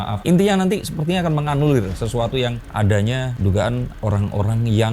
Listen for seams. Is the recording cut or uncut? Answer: cut